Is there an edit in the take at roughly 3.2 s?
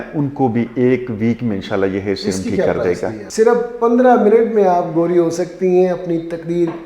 yes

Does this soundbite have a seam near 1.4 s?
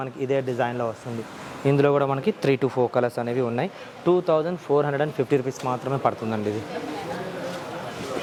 no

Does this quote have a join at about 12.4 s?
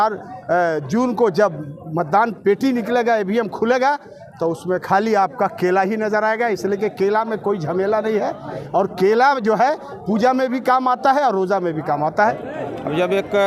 yes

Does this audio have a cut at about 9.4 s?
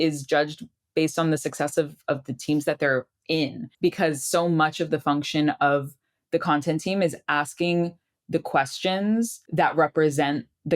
yes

